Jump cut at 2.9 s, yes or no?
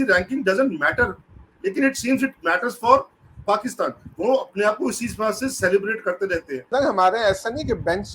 no